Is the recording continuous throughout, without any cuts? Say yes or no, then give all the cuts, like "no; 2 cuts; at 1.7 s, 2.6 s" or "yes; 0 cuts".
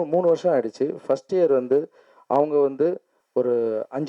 no; 1 cut; at 3.1 s